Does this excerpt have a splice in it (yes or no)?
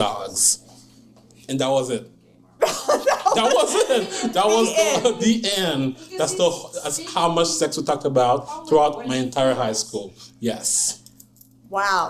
no